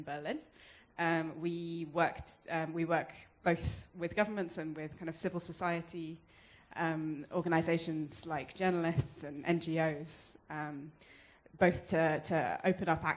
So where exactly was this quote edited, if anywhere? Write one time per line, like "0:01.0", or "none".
0:08.4